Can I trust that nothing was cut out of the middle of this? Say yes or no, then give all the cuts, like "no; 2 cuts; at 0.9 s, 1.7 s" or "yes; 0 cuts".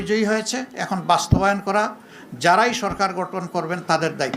yes; 0 cuts